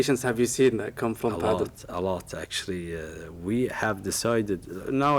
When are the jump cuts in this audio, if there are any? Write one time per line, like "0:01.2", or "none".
none